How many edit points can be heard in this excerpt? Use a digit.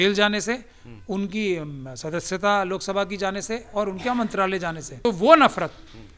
1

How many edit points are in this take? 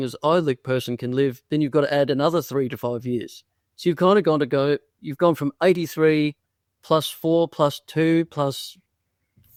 0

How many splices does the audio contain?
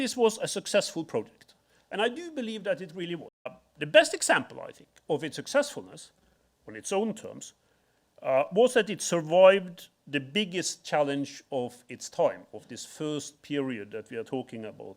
1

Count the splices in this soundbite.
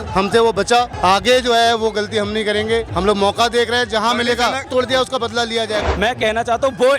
4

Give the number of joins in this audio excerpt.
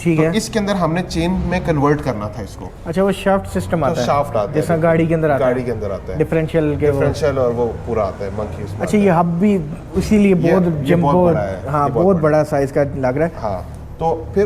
0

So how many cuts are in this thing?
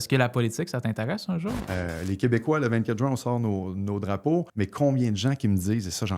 2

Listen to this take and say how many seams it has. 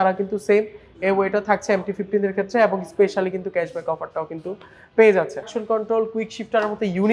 1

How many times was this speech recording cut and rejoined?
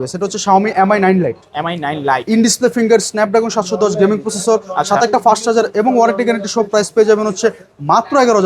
0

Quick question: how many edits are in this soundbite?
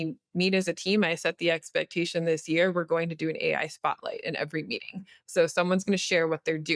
0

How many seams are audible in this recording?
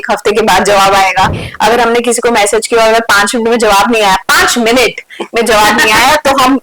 1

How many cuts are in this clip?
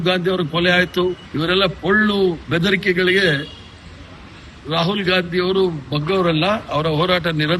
1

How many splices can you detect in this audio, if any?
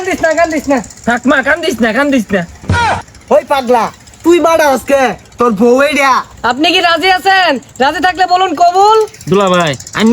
4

